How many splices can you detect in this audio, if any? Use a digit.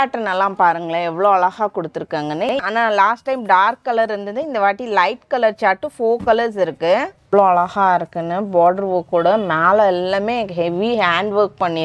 2